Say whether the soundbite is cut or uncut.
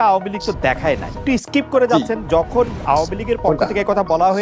cut